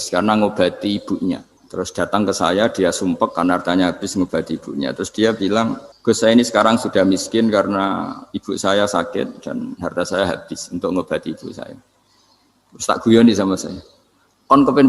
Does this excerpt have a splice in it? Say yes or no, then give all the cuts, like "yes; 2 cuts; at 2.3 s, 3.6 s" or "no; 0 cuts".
yes; 2 cuts; at 1.6 s, 5.9 s